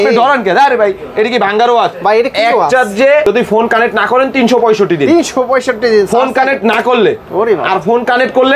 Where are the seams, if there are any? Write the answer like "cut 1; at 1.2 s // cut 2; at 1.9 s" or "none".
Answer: none